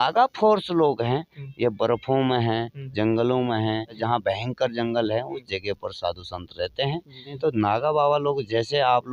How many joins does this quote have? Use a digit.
2